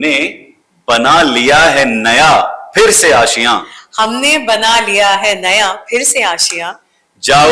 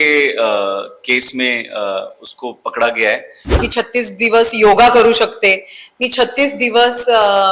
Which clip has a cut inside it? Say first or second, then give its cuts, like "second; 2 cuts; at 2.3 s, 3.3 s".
second; 1 cut; at 3.6 s